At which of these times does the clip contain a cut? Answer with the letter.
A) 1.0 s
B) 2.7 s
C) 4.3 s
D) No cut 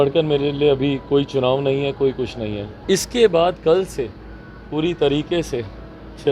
B